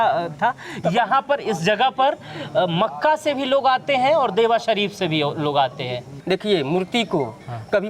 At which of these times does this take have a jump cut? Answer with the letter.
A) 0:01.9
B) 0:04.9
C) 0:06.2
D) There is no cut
C